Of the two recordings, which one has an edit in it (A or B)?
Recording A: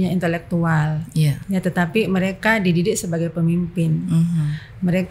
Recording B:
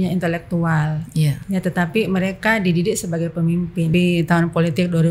B